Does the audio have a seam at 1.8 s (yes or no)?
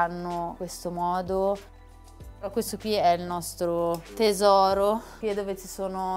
no